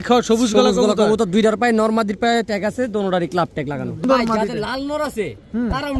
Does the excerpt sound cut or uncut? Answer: cut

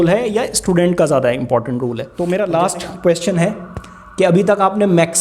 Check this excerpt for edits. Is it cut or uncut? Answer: cut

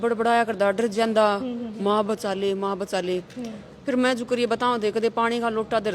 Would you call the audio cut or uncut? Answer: uncut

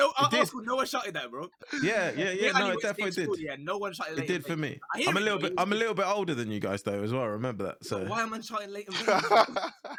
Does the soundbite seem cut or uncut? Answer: uncut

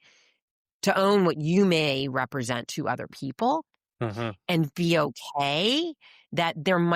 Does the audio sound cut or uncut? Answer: uncut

